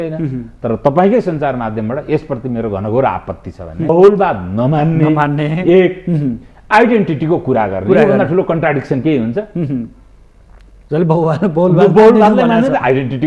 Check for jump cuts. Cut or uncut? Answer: cut